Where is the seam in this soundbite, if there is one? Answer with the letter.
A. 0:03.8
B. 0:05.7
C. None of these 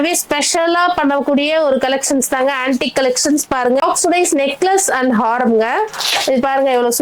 A